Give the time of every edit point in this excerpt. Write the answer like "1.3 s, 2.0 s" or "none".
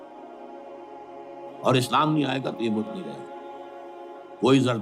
1.1 s